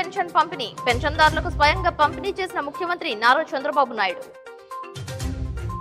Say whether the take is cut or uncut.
uncut